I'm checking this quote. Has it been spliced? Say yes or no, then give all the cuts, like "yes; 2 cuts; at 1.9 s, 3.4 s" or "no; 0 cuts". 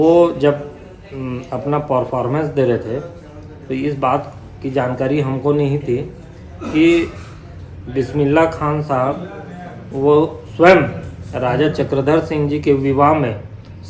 no; 0 cuts